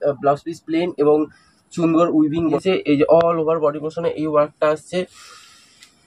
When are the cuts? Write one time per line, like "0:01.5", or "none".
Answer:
0:02.6